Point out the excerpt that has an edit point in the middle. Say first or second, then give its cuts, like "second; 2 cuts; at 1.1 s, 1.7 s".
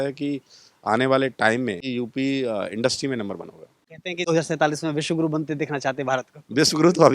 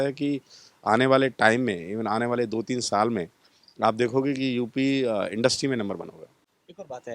first; 2 cuts; at 1.8 s, 4.3 s